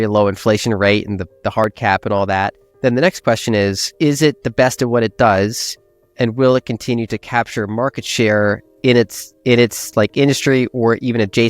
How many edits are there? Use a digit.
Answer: 1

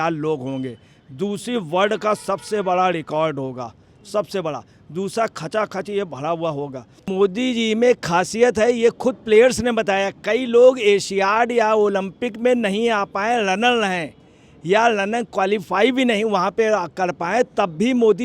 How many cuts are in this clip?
1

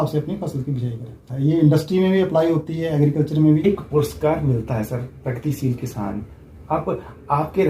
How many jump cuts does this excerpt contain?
2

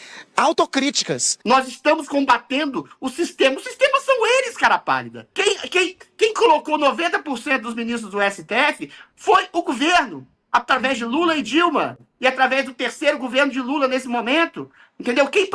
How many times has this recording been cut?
1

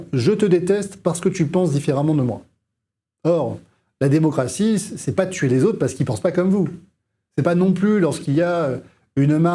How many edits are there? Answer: 0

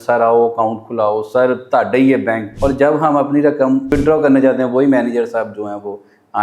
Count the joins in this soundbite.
2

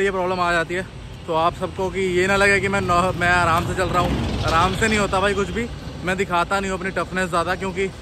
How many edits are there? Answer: 0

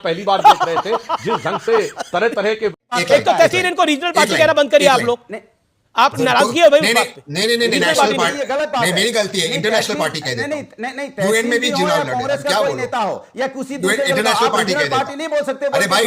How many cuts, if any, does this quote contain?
1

